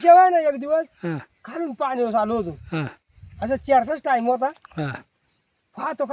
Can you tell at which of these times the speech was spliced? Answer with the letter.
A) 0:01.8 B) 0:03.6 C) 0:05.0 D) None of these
D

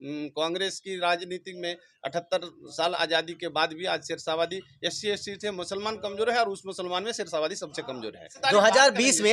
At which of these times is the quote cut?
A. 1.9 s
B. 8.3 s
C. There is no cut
B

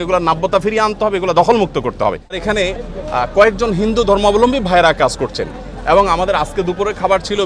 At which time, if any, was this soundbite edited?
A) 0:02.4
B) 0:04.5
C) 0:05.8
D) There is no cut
A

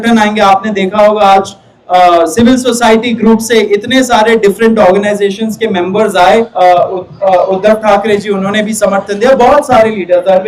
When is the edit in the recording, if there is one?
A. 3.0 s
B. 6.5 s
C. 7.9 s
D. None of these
B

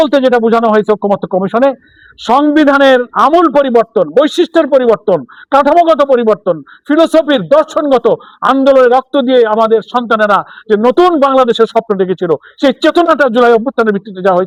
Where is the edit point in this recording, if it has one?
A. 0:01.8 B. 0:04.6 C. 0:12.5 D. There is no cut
D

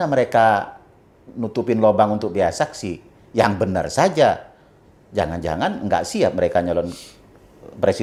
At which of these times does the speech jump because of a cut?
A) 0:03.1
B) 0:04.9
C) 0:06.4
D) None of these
D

